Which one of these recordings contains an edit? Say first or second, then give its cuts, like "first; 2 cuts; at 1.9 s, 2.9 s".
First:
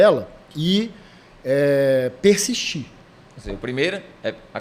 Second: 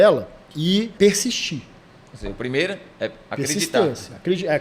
second; 1 cut; at 0.9 s